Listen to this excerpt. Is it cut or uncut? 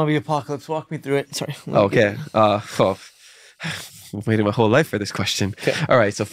uncut